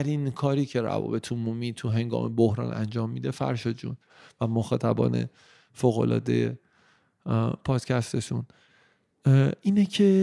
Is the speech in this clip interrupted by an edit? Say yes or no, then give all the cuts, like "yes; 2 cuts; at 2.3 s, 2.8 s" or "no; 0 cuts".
no; 0 cuts